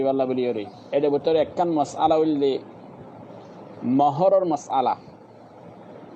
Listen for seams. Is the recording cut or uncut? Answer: uncut